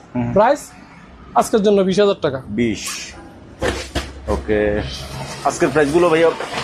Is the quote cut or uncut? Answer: uncut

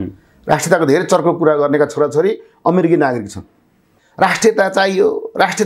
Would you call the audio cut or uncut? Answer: cut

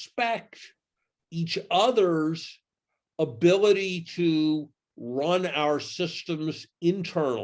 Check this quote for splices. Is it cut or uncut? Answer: uncut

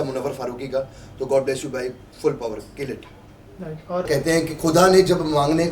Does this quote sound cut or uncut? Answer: cut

